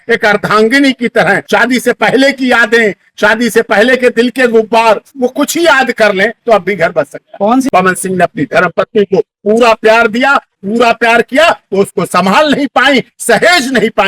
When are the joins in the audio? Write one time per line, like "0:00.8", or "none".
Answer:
0:01.4
0:07.7